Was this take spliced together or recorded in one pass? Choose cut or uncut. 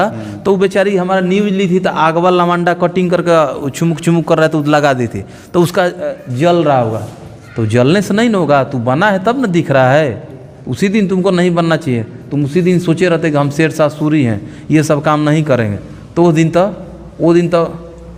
uncut